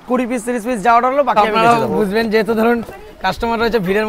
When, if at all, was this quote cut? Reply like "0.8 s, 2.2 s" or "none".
1.4 s